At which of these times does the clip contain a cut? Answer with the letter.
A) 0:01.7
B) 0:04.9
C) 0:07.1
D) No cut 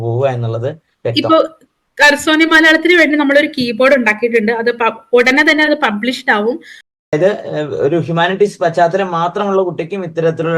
C